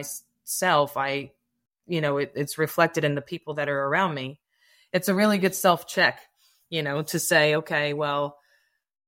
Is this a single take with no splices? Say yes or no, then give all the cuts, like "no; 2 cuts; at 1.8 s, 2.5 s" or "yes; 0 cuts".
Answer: yes; 0 cuts